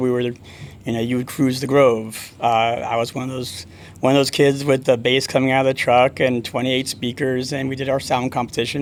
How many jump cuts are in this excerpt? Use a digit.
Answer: 0